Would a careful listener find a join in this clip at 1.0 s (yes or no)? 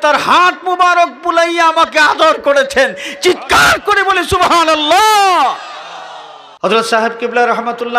no